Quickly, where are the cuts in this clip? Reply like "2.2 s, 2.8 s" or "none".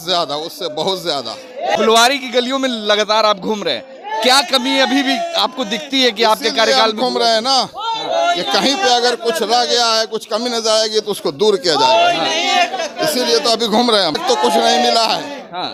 none